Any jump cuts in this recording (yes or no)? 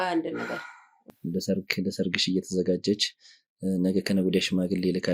yes